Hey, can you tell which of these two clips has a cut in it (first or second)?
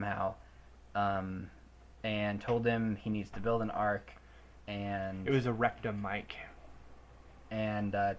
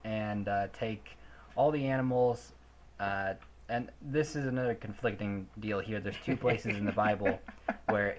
first